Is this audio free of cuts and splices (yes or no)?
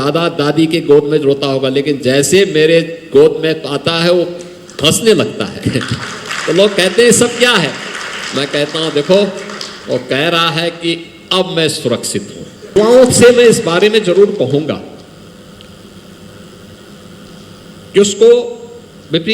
no